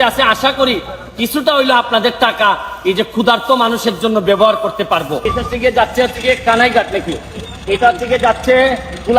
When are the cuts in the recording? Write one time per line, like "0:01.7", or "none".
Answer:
0:05.3